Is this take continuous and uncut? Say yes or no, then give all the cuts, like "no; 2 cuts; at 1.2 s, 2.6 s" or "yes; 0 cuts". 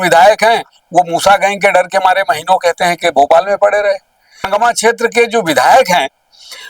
no; 1 cut; at 4.5 s